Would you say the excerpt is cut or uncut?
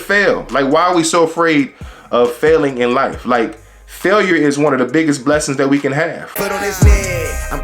cut